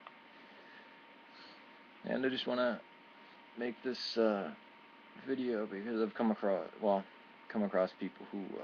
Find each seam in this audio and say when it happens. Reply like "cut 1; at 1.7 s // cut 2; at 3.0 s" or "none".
cut 1; at 5.6 s